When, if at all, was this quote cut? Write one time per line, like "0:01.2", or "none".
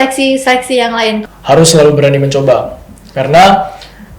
0:01.2

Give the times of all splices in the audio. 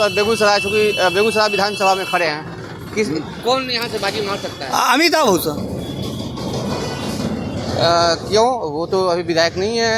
none

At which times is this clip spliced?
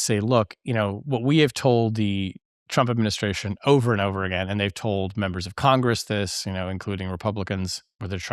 none

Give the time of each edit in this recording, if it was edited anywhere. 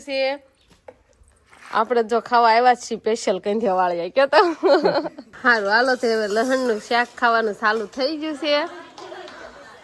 0:05.2

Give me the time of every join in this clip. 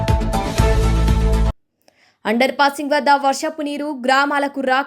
0:01.5

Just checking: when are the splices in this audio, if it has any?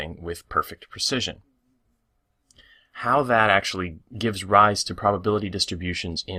none

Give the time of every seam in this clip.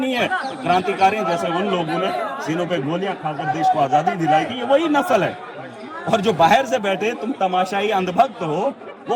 none

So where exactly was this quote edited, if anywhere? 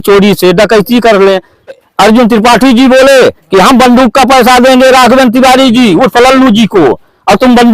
0:01.9

